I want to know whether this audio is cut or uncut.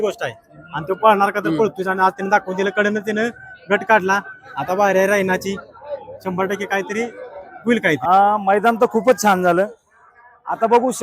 cut